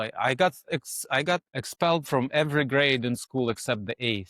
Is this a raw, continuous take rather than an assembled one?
no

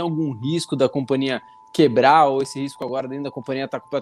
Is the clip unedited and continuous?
yes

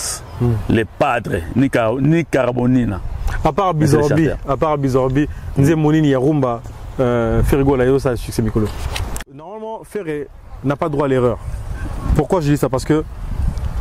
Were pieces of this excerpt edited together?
yes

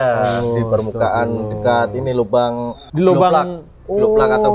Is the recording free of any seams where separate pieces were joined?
no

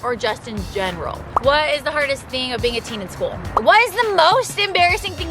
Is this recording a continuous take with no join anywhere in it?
no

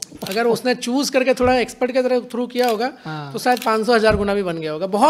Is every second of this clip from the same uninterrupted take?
yes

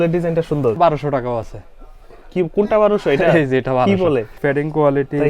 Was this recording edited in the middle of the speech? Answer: yes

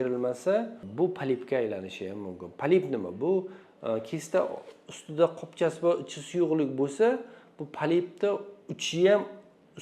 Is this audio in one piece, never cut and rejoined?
yes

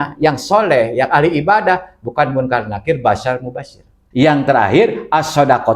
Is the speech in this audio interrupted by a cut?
yes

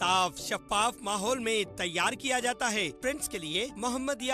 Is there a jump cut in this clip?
yes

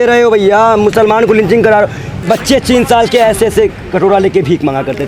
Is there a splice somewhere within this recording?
yes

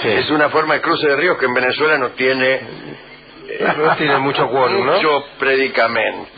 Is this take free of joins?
no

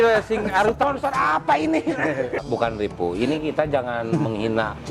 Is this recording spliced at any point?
yes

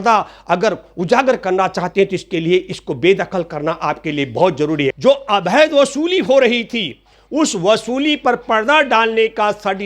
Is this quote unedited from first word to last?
no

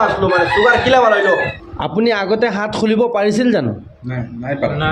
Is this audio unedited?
no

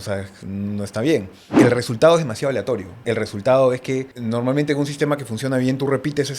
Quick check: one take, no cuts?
no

